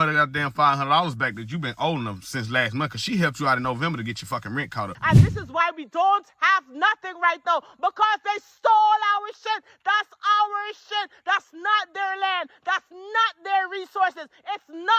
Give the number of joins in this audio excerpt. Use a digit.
1